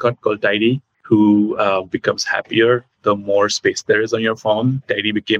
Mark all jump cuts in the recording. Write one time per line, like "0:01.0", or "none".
0:00.9